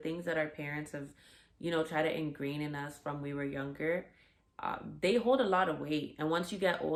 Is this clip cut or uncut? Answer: uncut